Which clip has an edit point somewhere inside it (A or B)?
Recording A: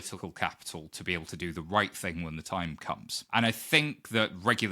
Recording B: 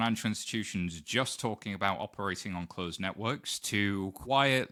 A